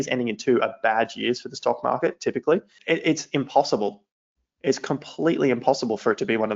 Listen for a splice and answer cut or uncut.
cut